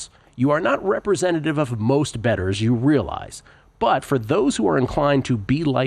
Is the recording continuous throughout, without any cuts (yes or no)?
yes